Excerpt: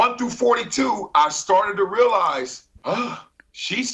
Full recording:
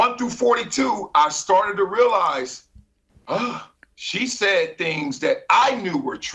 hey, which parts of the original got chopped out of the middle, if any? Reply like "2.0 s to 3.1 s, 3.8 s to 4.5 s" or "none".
2.7 s to 3.1 s